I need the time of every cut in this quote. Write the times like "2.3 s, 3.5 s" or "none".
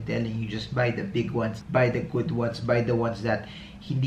1.6 s